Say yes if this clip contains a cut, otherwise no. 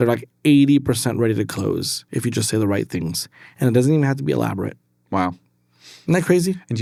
no